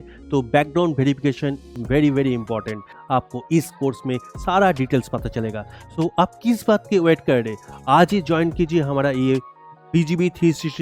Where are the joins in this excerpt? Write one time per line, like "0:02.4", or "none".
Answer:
0:02.9